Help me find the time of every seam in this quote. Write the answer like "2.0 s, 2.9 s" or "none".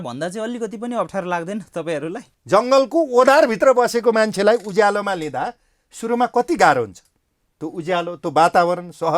2.3 s